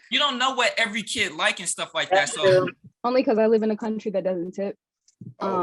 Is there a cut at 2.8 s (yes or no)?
yes